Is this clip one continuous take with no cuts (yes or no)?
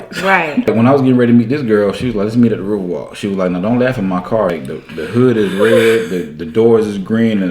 no